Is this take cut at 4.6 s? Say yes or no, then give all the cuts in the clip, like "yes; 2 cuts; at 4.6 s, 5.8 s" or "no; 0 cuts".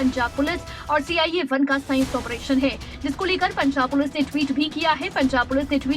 no; 1 cut; at 2.9 s